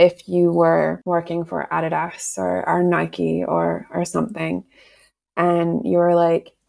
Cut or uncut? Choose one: cut